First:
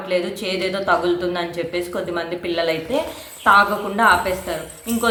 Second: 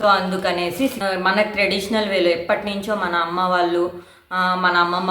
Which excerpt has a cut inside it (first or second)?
second